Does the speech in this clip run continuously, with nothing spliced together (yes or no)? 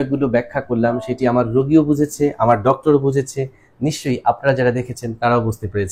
yes